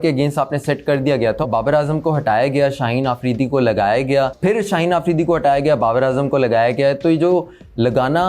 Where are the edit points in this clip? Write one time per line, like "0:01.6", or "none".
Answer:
0:04.3